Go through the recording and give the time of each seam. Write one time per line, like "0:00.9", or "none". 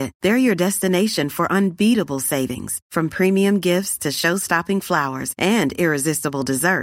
none